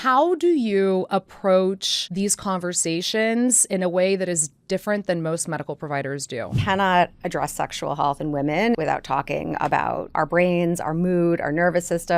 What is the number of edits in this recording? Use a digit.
4